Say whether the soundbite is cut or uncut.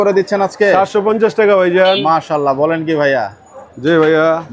uncut